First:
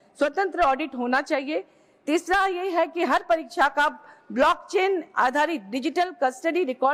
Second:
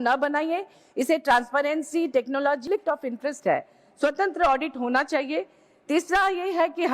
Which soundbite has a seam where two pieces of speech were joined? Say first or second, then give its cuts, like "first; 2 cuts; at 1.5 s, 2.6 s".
second; 1 cut; at 2.6 s